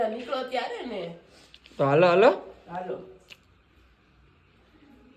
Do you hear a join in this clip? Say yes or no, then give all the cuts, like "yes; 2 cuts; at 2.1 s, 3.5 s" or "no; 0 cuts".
no; 0 cuts